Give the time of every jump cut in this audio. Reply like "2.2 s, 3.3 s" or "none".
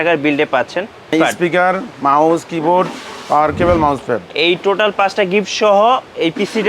1.1 s